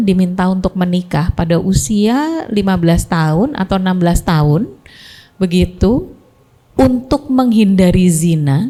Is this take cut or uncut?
uncut